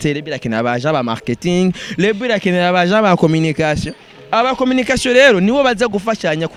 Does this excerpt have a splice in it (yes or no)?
no